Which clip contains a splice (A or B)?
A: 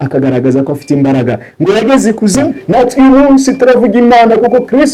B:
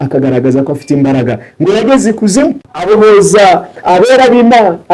A